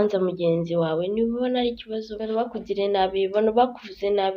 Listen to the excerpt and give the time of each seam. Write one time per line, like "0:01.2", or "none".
0:02.2